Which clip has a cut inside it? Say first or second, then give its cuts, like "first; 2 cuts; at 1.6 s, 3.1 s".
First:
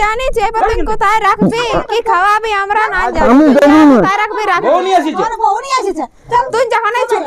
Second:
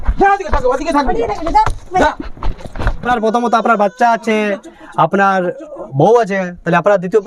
second; 1 cut; at 3.1 s